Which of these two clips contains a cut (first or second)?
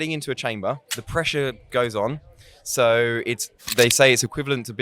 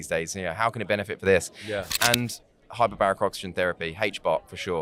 first